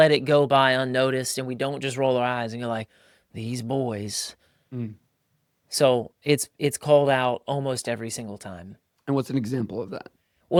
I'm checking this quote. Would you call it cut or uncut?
uncut